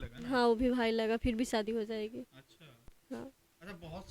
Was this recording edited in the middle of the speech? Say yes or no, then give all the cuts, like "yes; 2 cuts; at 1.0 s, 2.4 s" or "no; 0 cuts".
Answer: no; 0 cuts